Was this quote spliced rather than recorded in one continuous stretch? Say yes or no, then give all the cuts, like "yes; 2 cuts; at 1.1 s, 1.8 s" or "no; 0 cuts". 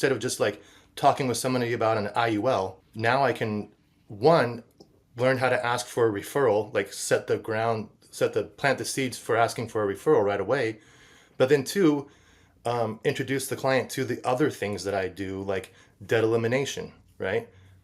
yes; 1 cut; at 2.8 s